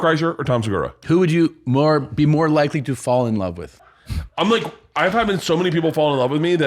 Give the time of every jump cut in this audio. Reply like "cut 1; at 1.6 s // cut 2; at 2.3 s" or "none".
cut 1; at 1.0 s // cut 2; at 3.7 s